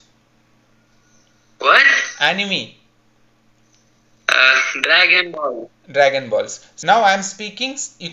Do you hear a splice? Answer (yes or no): yes